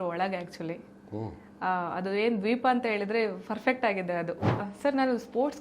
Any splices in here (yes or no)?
yes